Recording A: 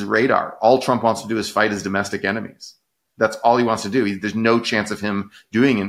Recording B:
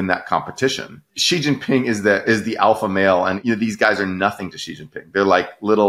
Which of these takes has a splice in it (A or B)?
B